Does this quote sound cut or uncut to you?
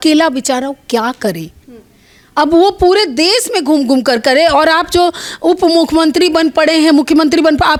uncut